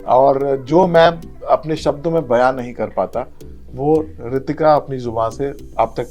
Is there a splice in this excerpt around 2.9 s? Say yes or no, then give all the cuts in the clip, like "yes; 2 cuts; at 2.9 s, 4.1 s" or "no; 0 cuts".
no; 0 cuts